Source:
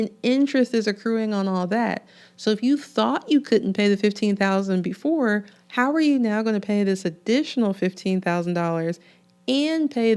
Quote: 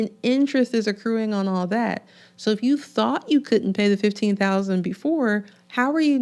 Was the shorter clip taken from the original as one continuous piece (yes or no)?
yes